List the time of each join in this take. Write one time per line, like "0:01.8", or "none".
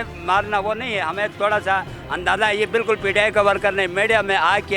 none